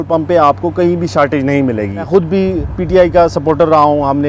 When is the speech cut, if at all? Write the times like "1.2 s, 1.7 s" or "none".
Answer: 2.0 s